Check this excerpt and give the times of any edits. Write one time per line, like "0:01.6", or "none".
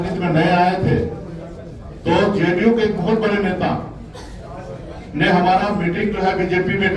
none